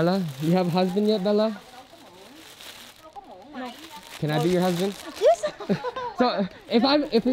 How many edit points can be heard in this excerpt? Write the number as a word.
zero